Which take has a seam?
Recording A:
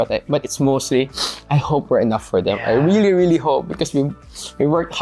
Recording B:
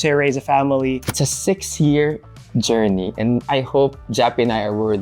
B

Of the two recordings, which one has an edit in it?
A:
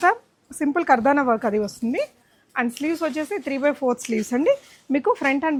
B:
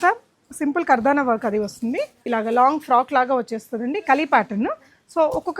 B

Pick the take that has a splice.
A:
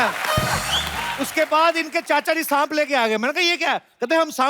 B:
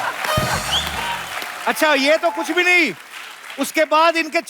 A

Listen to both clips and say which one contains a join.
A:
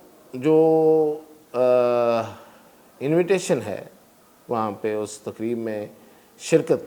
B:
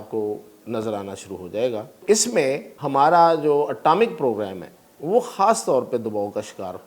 B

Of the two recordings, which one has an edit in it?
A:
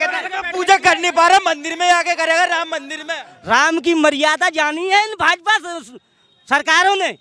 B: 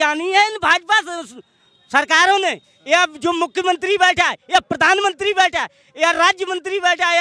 A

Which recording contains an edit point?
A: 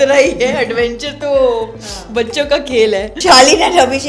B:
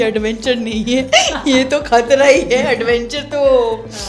A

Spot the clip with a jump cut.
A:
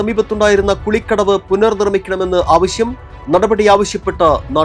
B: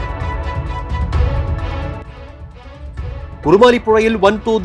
B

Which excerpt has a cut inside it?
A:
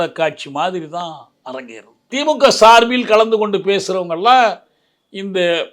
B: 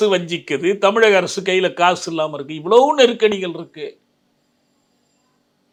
A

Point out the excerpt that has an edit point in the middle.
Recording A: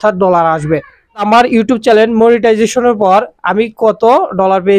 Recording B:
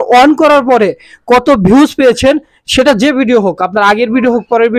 A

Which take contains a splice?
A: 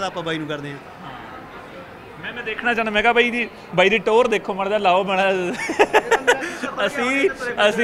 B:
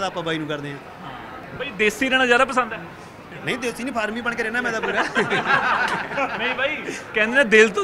B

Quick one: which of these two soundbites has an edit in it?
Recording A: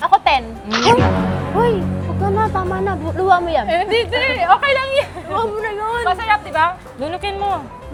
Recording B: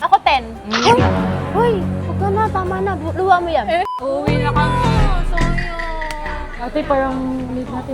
B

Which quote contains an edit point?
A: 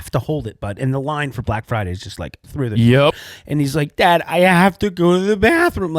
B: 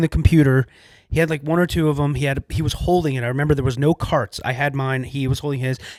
A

